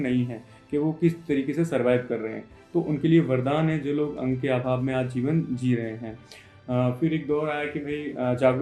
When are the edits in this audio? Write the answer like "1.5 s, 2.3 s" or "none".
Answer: none